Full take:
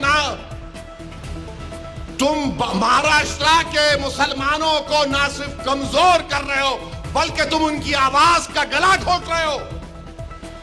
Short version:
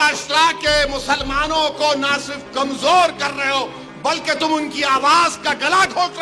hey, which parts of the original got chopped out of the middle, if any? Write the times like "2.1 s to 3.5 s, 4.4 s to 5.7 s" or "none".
none

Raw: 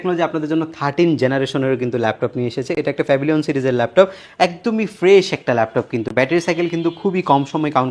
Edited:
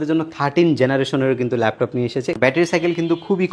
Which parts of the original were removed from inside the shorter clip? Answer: 2.8 s to 6.1 s

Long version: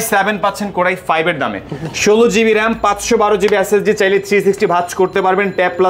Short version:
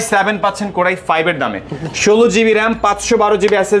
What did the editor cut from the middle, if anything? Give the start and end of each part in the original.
none

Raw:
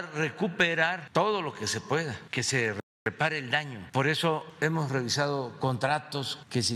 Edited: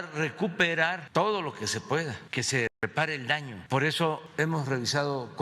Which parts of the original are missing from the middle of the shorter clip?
2.7 s to 2.9 s

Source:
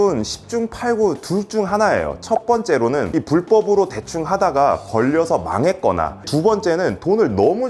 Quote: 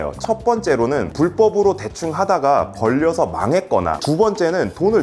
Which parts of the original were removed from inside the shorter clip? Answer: 3.1 s to 3.2 s, 6.1 s to 6.2 s

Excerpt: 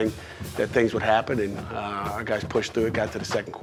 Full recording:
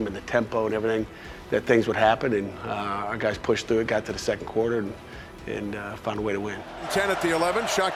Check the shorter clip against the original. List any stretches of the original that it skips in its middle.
none

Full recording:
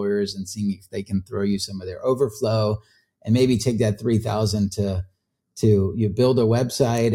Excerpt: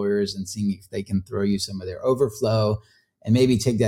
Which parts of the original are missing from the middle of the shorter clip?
none

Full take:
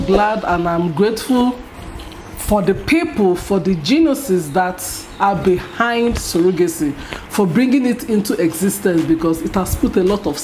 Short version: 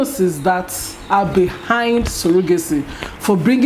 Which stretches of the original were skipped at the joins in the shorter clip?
none

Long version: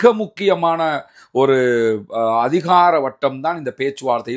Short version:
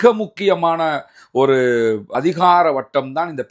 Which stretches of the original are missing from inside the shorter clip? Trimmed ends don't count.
2.2 s to 2.4 s

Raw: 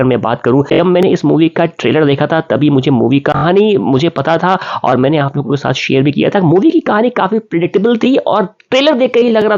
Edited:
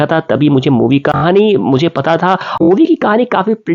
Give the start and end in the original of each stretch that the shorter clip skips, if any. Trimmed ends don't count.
4.8 s to 6.5 s

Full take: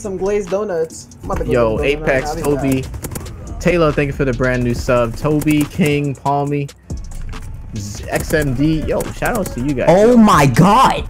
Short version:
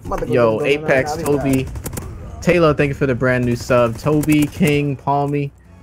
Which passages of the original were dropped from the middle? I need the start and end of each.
none

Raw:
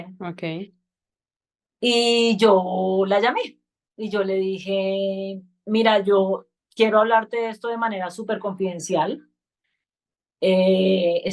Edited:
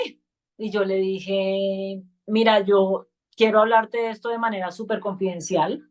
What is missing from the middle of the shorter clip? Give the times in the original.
none

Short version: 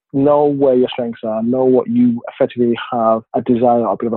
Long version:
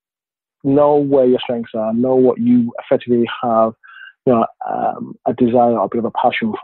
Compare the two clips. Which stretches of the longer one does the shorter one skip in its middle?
3.8 s to 5.2 s

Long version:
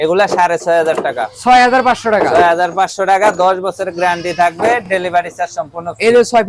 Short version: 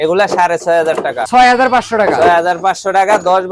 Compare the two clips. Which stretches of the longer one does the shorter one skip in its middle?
1.2 s to 1.3 s

